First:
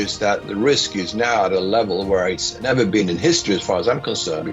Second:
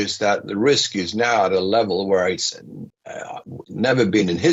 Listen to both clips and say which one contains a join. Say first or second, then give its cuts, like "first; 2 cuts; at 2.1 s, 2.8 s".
first; 1 cut; at 2.5 s